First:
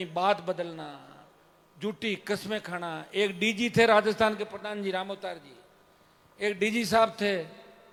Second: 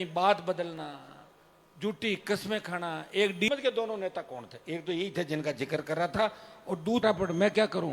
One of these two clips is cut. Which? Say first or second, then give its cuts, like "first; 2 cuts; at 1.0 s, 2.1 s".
second; 2 cuts; at 3.5 s, 7.0 s